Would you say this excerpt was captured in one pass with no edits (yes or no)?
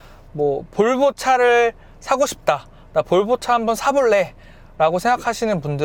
yes